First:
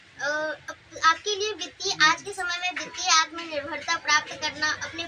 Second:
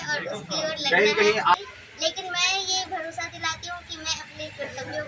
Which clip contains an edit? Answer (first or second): second